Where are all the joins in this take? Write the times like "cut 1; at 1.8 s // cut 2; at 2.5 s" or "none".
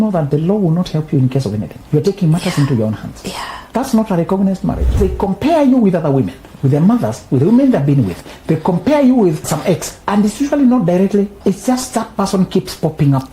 cut 1; at 1.7 s // cut 2; at 3.6 s // cut 3; at 5.0 s // cut 4; at 9.7 s // cut 5; at 11.4 s